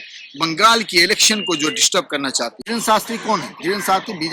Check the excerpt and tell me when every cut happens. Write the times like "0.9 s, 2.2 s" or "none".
2.6 s